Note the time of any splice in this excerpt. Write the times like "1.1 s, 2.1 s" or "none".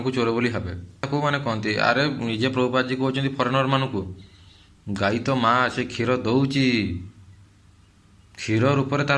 1.0 s